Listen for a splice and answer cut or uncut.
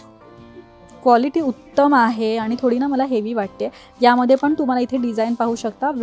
uncut